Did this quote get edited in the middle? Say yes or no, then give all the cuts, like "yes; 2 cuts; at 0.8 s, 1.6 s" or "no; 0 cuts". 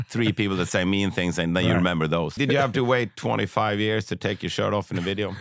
yes; 1 cut; at 2.3 s